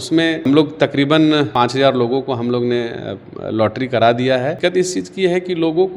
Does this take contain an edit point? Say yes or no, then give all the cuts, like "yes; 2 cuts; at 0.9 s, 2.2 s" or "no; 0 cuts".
yes; 2 cuts; at 1.5 s, 4.6 s